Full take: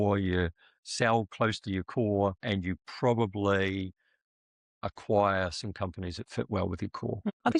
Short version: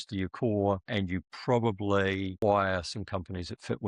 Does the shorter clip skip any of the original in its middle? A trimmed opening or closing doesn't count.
yes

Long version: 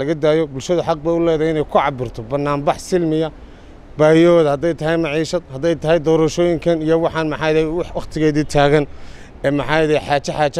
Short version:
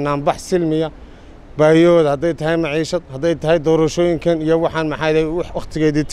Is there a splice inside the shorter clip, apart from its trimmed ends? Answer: no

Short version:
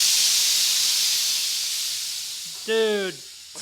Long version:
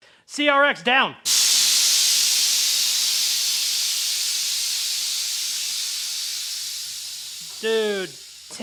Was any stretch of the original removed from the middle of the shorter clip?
yes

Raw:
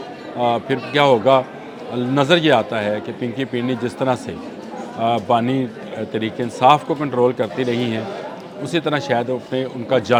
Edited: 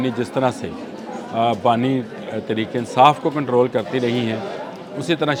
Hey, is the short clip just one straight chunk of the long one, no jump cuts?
yes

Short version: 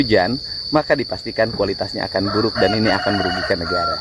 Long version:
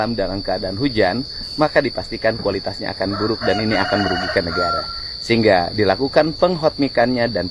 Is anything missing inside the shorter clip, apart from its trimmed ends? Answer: no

